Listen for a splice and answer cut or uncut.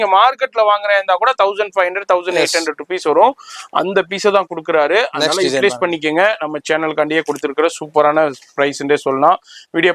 uncut